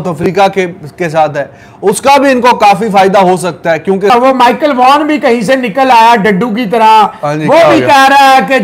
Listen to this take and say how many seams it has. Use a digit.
1